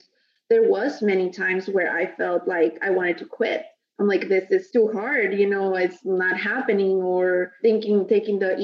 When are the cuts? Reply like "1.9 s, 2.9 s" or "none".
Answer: 4.7 s, 7.6 s